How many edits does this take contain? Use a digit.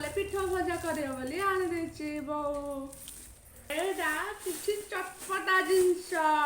1